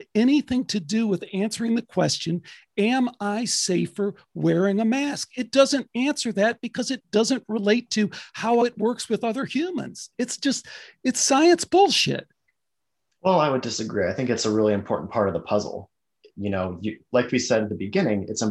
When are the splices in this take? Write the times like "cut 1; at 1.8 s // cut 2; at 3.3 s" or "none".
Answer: cut 1; at 8.6 s